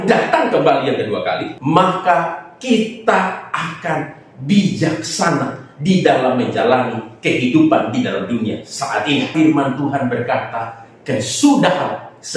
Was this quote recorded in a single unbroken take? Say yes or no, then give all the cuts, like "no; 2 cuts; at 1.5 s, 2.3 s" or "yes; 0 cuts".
no; 2 cuts; at 1.5 s, 9.3 s